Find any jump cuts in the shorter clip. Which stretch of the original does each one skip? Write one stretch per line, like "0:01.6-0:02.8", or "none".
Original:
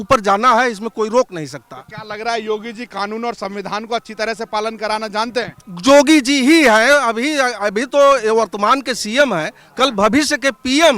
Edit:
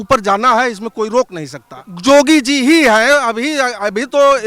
0:01.8-0:05.6